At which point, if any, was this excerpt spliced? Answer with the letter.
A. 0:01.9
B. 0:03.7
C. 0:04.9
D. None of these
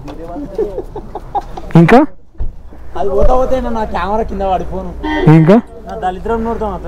D